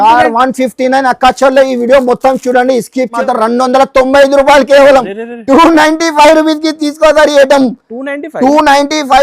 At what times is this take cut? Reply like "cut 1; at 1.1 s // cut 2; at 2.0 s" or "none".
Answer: cut 1; at 3.1 s